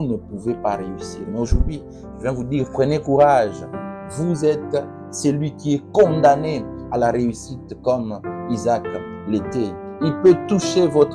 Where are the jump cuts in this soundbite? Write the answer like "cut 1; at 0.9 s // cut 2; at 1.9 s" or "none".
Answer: cut 1; at 9.9 s